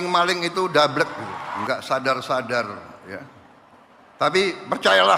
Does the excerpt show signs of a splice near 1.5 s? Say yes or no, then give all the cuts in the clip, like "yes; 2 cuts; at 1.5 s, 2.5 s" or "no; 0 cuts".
yes; 1 cut; at 1.5 s